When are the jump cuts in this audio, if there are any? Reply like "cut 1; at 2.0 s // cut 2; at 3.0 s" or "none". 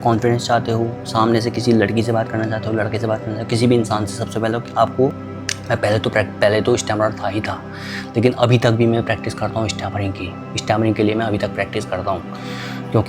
cut 1; at 5.2 s